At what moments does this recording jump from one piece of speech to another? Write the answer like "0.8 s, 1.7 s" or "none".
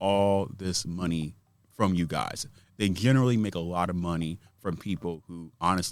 none